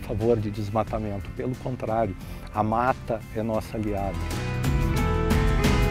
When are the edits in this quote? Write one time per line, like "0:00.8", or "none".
none